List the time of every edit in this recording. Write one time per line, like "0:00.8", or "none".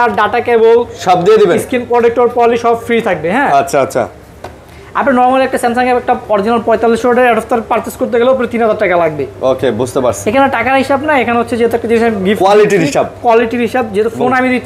none